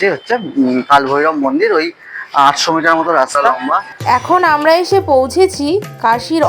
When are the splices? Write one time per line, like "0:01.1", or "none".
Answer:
0:03.5

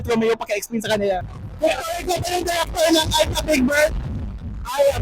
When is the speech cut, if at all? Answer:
0:01.3

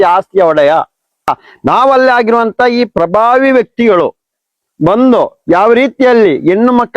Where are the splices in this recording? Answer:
0:01.3

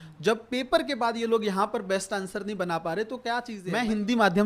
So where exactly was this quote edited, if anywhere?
0:03.5

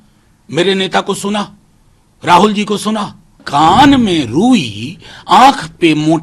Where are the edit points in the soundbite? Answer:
0:03.4

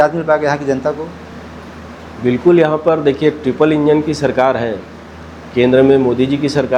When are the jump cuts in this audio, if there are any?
none

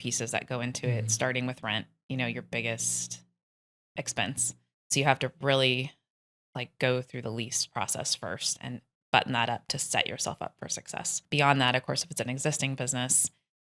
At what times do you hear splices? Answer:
0:04.9

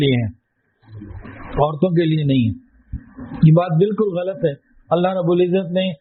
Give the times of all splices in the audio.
none

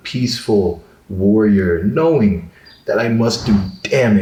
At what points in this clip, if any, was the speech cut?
none

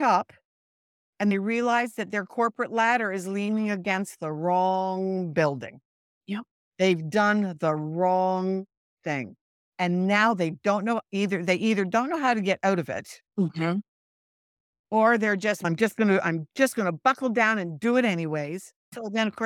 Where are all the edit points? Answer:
none

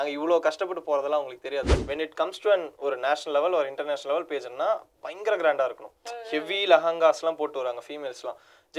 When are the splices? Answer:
0:01.7

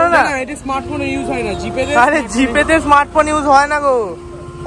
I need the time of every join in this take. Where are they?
none

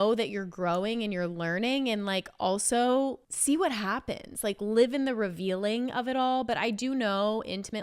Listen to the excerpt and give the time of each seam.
0:03.3

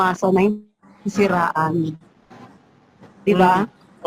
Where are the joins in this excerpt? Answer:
none

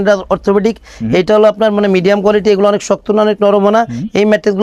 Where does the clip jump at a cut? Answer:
none

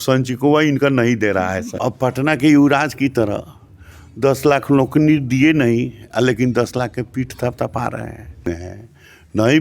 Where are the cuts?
0:01.7
0:08.5

